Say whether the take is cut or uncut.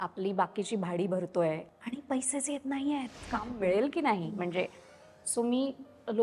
cut